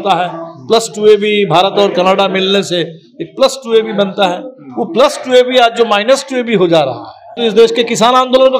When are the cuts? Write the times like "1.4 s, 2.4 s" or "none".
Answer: 7.3 s